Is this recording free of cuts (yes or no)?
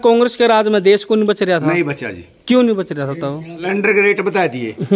no